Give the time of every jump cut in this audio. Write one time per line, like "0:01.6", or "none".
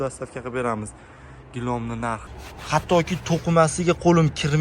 0:02.2